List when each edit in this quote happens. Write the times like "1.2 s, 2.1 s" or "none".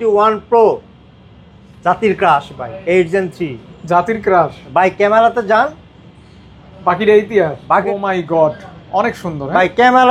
7.8 s